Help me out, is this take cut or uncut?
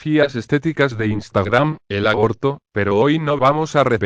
uncut